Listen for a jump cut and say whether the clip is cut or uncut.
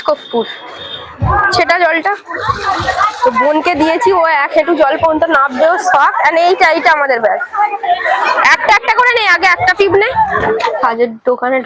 cut